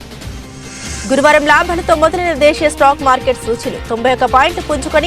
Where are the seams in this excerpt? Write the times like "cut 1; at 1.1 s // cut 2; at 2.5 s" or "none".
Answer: cut 1; at 1.0 s